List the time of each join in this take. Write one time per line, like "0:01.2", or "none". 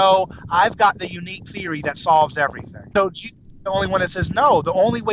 0:02.9